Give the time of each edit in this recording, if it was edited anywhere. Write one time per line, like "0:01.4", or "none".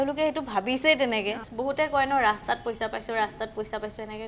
0:01.5